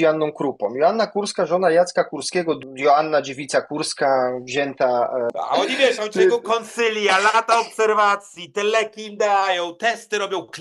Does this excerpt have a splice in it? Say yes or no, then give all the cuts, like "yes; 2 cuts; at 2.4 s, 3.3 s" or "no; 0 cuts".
yes; 2 cuts; at 2.6 s, 5.3 s